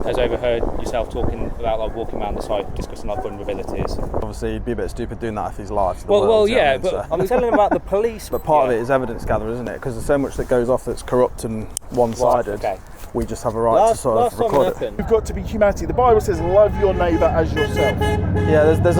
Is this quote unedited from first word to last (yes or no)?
no